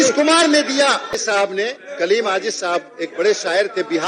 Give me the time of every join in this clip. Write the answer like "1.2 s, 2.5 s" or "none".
1.1 s